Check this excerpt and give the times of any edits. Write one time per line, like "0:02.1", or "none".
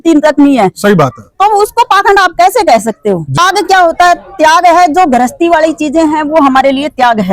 0:03.4